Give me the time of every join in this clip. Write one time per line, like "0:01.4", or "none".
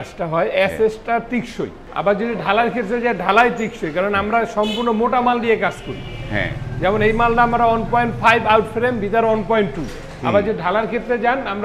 0:01.9